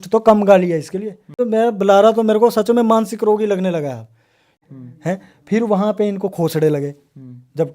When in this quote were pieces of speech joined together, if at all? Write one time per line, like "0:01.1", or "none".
0:01.4
0:04.5